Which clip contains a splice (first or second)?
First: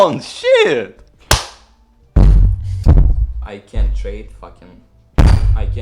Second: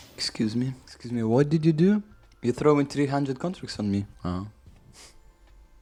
first